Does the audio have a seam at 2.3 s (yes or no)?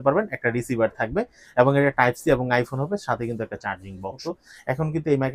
no